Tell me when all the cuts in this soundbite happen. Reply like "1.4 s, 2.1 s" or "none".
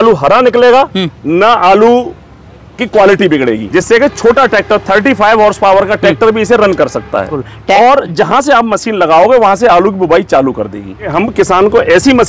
3.6 s, 7.3 s, 11.1 s